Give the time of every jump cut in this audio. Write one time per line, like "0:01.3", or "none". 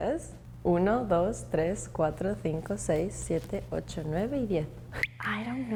none